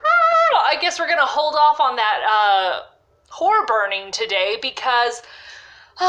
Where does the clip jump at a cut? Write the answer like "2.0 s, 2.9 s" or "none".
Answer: none